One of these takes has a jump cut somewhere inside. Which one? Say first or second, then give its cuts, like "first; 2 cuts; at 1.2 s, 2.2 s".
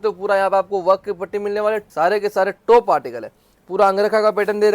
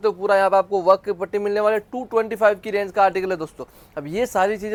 first; 1 cut; at 1.9 s